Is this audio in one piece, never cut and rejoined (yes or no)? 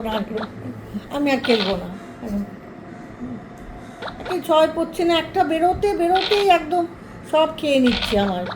no